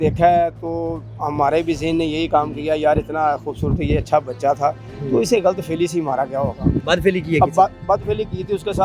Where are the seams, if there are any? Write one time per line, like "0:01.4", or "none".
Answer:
none